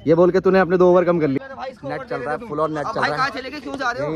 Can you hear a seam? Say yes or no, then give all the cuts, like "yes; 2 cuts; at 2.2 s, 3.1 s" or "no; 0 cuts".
yes; 1 cut; at 1.4 s